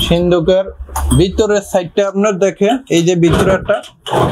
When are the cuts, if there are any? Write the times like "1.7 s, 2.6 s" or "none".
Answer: none